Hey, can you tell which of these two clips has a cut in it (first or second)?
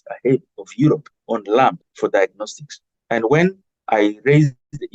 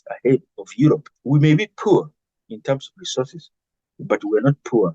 second